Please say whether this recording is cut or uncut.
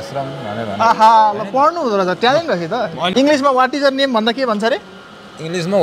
cut